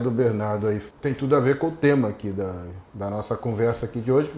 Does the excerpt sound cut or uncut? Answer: cut